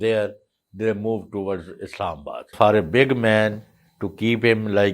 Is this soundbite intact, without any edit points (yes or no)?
no